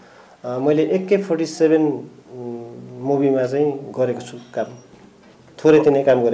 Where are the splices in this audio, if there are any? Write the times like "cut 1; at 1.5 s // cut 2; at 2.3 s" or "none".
none